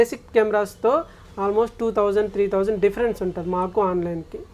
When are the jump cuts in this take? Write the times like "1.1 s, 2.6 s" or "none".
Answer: none